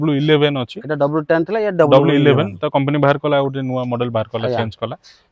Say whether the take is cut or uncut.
uncut